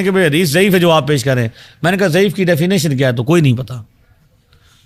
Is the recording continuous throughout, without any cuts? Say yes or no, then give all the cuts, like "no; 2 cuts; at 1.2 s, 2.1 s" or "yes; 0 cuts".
yes; 0 cuts